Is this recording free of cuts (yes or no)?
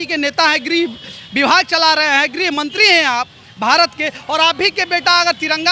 yes